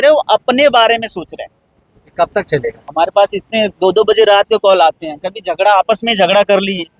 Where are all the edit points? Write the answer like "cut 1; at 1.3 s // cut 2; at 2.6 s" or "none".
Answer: cut 1; at 2.8 s